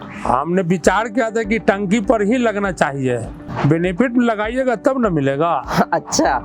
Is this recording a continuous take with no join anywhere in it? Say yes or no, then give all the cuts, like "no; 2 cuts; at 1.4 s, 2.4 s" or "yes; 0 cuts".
no; 1 cut; at 3.5 s